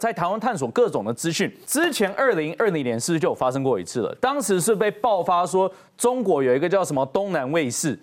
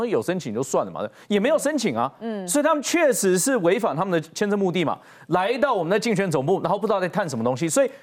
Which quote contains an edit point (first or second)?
first